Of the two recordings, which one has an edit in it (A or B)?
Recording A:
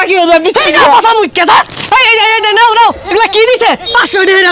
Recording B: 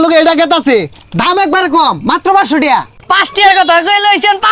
B